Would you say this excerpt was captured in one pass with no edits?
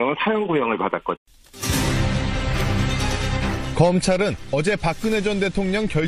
yes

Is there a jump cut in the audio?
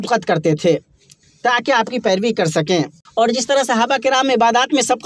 yes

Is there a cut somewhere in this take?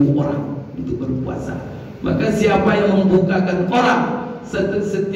no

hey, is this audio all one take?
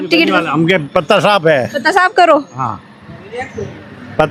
yes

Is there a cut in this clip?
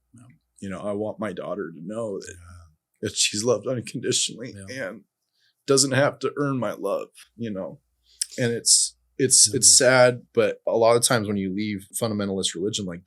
yes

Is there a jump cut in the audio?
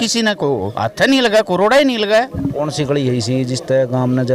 no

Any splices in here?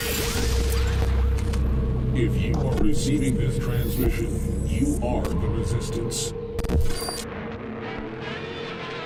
no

